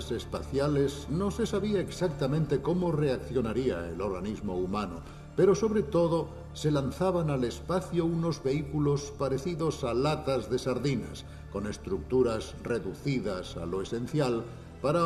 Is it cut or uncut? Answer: cut